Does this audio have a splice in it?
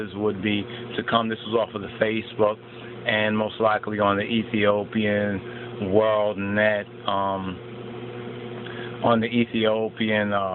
yes; 1 cut; at 8.7 s

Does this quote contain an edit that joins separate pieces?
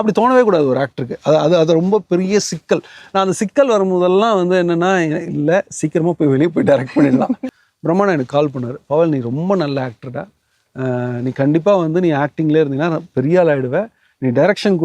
yes; 1 cut; at 7.6 s

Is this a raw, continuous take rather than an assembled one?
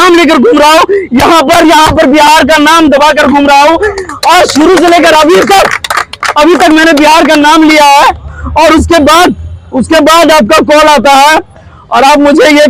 yes; 0 cuts

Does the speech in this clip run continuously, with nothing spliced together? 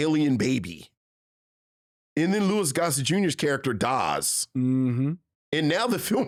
yes; 0 cuts

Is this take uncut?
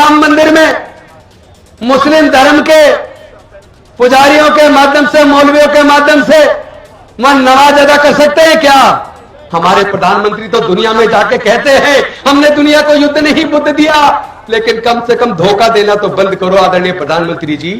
no; 1 cut; at 9.4 s

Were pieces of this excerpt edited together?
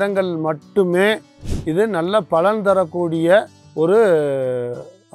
no; 0 cuts

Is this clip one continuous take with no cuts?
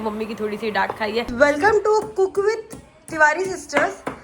no; 1 cut; at 1.3 s

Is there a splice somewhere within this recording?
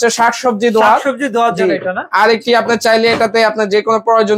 no; 0 cuts

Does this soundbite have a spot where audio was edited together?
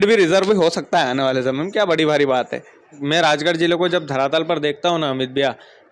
yes; 1 cut; at 3.0 s

